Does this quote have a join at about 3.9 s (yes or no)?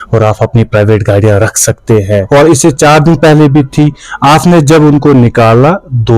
no